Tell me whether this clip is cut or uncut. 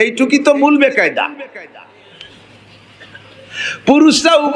uncut